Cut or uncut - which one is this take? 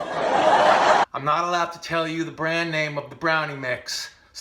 cut